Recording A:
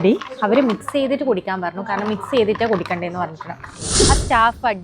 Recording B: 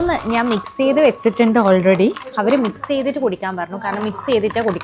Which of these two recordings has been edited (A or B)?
A